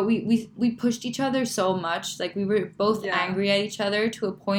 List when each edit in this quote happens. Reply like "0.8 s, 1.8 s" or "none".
none